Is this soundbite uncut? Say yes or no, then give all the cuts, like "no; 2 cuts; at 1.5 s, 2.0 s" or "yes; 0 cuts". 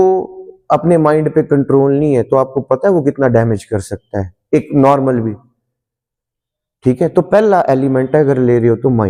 yes; 0 cuts